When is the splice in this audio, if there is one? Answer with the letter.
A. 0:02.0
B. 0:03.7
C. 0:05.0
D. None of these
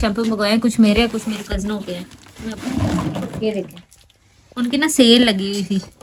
D